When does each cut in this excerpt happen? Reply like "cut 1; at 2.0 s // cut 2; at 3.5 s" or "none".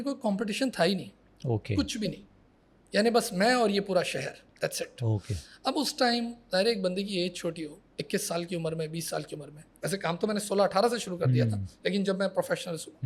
none